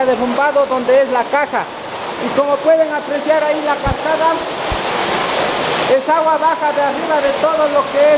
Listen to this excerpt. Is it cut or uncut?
uncut